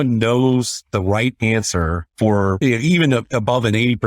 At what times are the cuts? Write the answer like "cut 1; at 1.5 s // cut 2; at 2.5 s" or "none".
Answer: cut 1; at 2.5 s

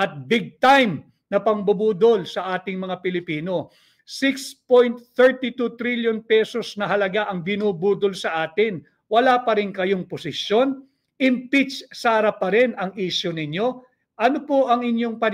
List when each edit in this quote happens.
none

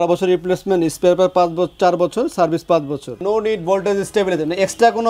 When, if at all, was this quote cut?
cut 1; at 3.2 s

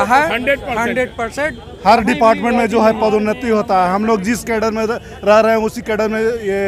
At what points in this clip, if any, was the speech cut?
none

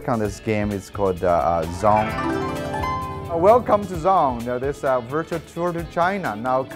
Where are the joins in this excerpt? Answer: none

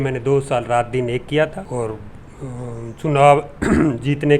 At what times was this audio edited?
cut 1; at 1.7 s

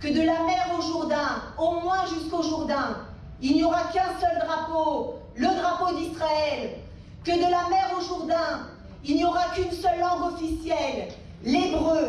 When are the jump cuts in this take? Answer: none

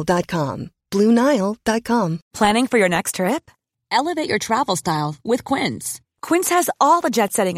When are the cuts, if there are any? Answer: cut 1; at 2.2 s

